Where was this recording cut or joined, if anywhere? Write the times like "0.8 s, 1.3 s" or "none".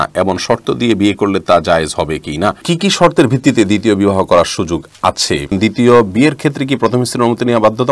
2.7 s, 5.6 s